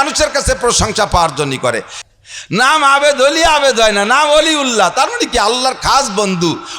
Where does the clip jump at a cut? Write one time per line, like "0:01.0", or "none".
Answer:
0:01.9